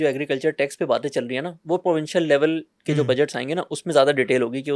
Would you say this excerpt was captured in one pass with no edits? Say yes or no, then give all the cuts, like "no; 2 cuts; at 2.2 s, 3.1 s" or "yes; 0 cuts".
yes; 0 cuts